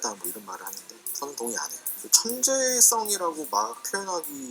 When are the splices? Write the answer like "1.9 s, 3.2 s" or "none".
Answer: none